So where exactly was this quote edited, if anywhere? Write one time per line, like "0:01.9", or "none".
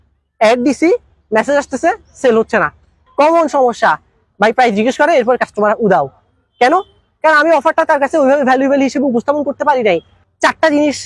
0:03.0
0:10.2